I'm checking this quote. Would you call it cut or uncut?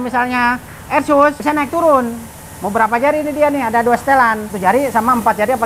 cut